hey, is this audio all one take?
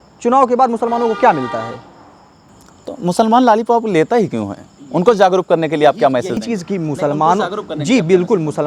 yes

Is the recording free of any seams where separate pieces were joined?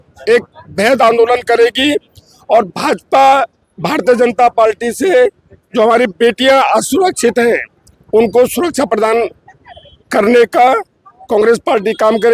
yes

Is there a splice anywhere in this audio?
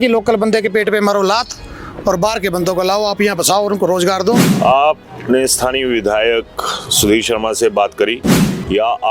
yes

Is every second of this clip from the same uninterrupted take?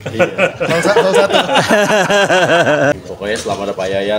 no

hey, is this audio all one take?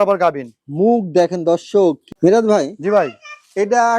no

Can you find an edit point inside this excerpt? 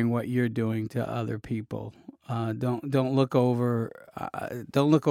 no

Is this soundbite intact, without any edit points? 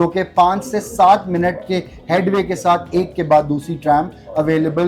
yes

